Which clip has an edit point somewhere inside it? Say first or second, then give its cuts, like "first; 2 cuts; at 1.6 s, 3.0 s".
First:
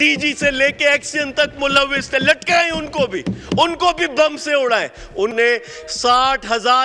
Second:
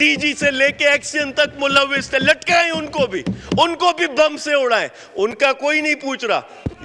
first; 1 cut; at 5.3 s